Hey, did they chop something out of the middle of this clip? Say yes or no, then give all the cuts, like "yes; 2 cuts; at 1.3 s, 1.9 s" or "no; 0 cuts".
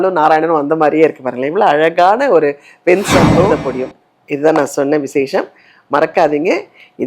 yes; 1 cut; at 3.4 s